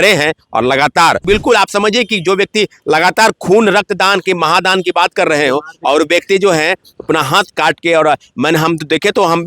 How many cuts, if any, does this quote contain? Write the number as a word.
one